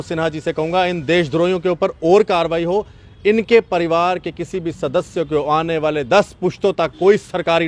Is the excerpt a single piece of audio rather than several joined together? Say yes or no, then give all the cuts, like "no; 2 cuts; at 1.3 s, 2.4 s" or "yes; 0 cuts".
yes; 0 cuts